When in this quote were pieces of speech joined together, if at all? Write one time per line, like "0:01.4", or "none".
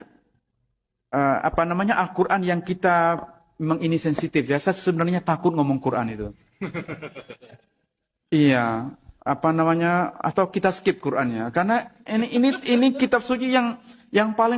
none

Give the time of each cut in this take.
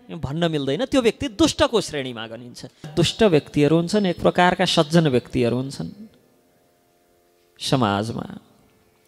0:02.9

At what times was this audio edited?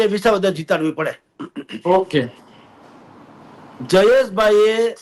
none

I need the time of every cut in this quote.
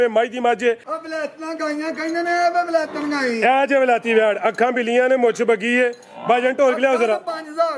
0:00.9

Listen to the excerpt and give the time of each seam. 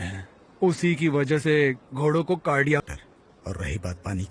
0:02.9

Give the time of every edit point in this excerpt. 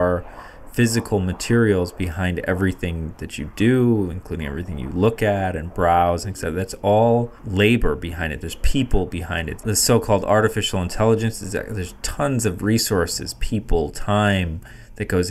0:07.4
0:09.6

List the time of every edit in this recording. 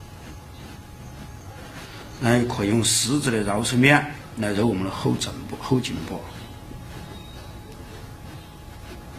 none

